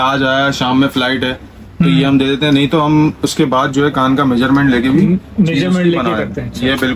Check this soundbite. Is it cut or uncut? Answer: uncut